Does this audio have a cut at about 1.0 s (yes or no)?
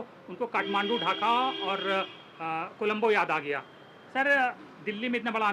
no